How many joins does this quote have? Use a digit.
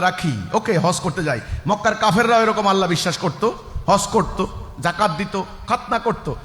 0